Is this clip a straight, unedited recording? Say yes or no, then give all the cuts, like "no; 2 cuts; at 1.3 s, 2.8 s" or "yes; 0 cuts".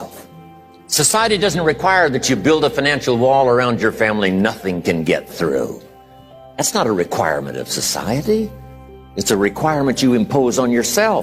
yes; 0 cuts